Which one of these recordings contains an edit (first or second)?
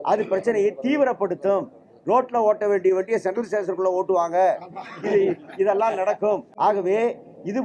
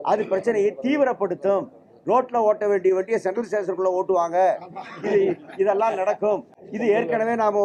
first